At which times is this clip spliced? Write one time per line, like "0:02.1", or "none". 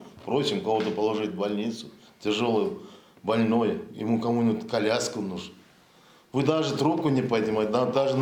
none